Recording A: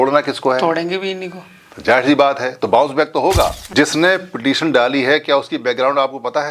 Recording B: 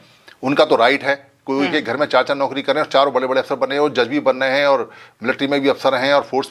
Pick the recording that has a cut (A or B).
A